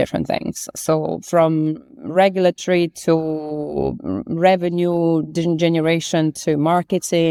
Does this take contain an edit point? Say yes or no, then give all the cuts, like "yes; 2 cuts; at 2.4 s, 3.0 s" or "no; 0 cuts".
no; 0 cuts